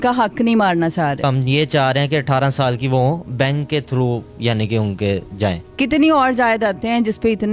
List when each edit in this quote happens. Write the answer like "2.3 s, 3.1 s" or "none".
1.2 s, 5.6 s